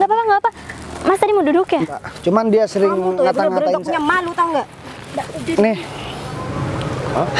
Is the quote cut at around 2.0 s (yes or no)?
yes